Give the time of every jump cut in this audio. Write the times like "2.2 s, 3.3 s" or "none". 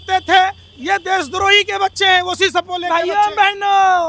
2.9 s